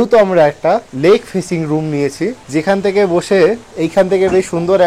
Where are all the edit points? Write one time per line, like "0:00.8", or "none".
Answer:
0:00.9
0:02.4